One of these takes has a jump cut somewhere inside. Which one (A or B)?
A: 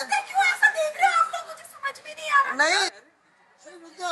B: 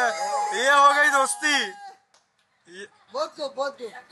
A